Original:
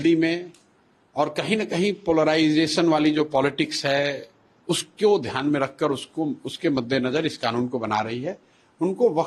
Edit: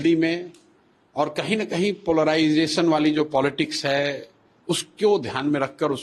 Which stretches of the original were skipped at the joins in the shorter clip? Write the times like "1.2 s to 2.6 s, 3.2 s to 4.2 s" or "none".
none